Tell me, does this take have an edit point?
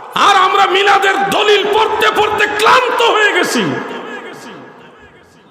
no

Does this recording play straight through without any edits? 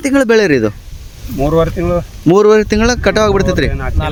yes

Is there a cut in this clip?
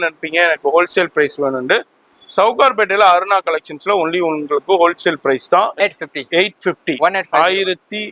yes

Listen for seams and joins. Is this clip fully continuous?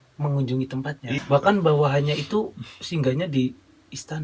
no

